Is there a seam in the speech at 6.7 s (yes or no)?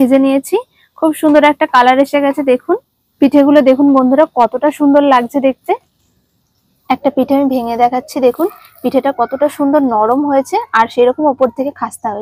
yes